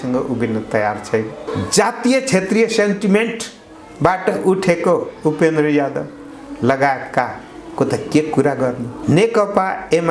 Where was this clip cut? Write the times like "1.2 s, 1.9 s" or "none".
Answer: 1.5 s, 8.9 s